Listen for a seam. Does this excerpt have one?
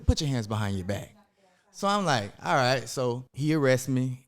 yes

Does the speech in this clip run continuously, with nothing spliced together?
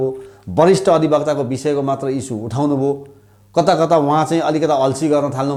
yes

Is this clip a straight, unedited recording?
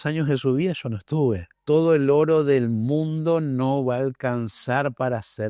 no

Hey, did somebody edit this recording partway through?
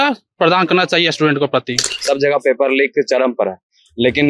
yes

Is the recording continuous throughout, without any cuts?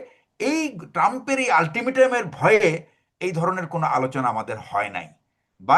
yes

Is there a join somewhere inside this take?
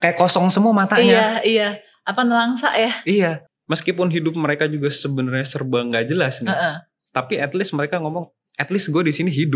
yes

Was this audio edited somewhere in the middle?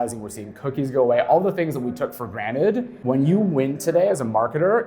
yes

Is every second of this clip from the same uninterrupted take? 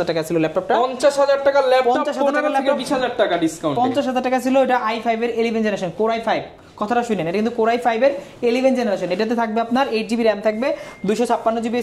yes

